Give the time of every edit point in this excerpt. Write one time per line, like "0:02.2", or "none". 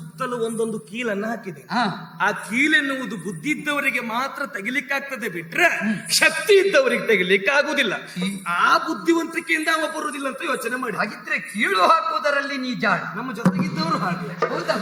none